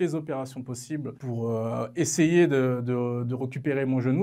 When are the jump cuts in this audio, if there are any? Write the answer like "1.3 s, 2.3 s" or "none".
none